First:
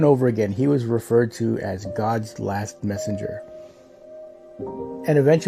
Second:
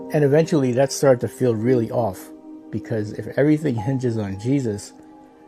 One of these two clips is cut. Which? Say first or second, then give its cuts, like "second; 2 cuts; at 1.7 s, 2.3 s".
first; 1 cut; at 3.4 s